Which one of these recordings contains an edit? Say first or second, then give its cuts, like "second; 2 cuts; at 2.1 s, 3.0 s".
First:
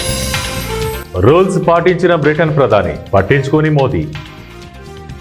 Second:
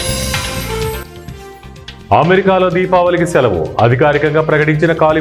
first; 1 cut; at 1.0 s